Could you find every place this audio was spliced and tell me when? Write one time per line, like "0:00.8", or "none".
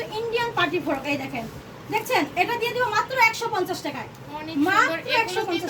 none